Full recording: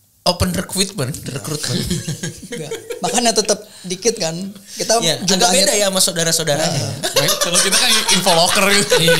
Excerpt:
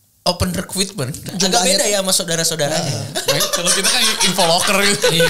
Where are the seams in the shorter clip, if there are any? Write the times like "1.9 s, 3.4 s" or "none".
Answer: 1.3 s